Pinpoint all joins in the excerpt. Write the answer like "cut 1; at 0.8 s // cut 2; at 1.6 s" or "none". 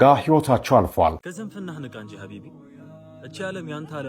cut 1; at 1.2 s